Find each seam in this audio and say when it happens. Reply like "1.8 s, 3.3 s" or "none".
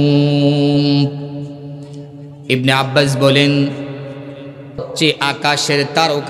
2.3 s, 4.9 s